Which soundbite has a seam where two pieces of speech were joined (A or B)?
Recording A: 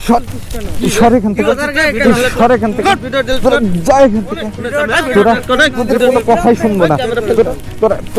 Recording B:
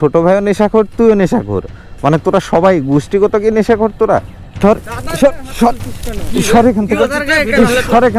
B